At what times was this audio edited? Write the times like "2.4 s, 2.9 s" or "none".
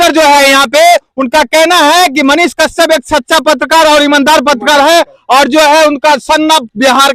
none